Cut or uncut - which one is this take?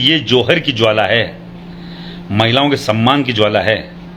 uncut